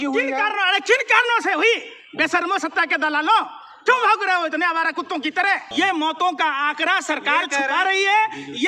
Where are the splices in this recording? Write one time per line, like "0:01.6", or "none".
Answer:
0:05.7